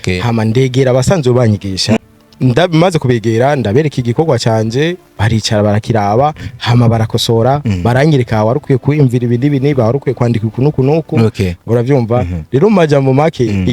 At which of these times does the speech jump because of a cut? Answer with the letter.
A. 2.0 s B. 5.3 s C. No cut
A